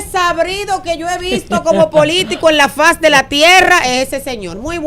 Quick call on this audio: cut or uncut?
uncut